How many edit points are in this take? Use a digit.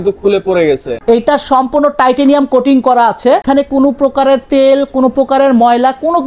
2